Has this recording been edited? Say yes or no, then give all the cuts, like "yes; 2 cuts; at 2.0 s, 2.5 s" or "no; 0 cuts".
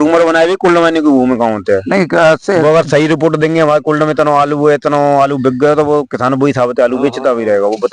no; 0 cuts